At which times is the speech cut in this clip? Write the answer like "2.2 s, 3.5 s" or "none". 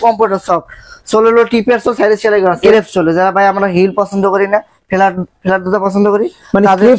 2.6 s